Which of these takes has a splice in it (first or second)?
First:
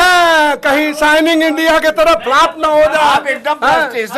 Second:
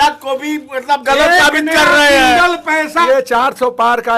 second